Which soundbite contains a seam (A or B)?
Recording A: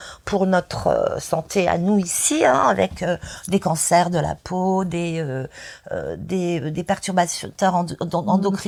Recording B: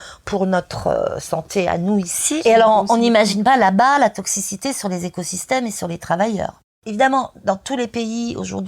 B